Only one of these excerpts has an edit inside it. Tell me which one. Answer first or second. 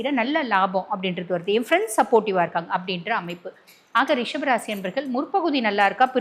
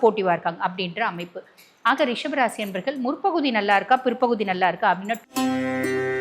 second